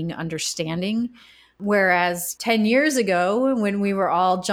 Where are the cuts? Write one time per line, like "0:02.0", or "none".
0:01.6
0:02.3